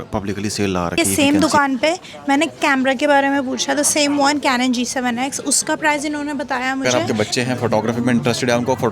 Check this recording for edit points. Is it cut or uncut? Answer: cut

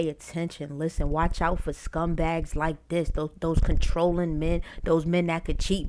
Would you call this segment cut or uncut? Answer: uncut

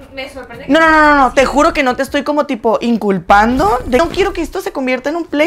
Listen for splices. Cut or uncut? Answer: cut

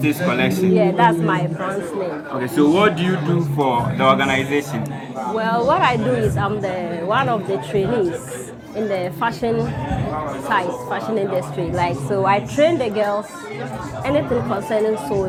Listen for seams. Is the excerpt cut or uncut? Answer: uncut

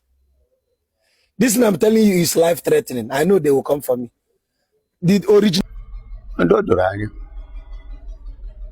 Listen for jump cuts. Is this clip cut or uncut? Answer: cut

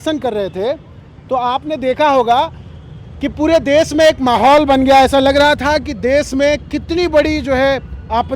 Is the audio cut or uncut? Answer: uncut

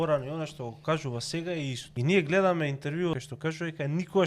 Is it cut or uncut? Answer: cut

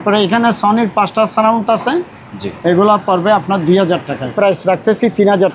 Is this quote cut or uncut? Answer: cut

